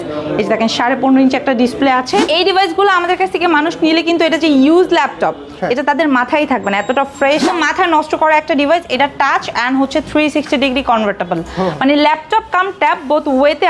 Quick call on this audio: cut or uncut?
cut